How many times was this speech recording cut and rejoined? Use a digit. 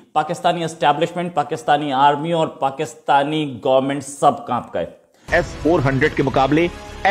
1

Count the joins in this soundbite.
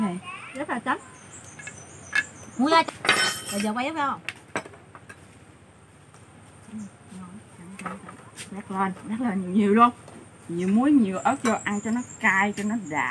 0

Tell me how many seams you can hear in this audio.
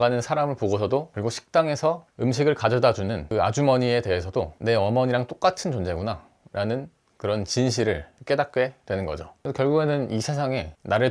2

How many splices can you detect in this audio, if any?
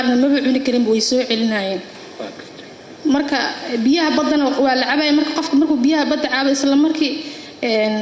0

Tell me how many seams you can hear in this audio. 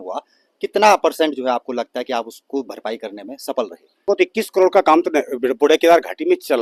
1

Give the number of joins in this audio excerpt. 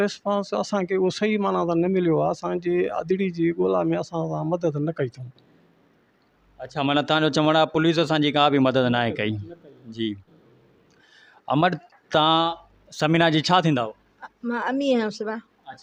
0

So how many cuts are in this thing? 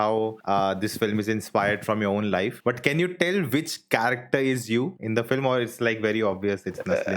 1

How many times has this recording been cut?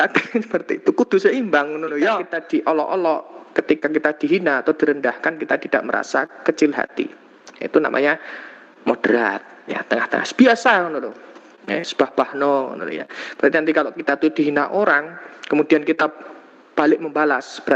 1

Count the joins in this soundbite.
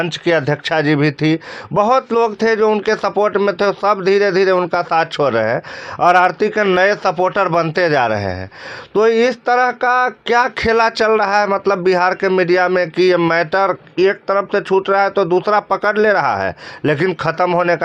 0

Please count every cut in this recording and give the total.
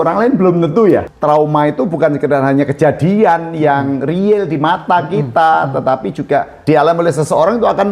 2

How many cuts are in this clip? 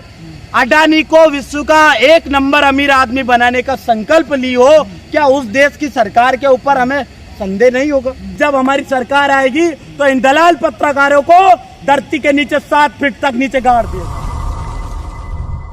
2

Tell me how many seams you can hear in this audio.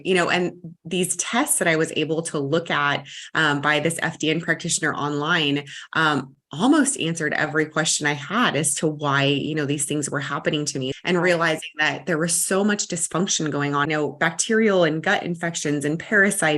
2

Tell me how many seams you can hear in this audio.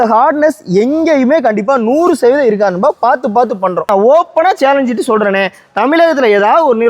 1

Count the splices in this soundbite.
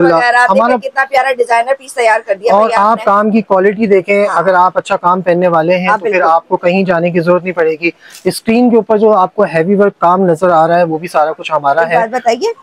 0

